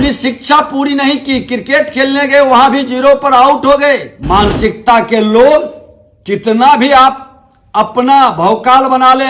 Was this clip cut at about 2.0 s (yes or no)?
no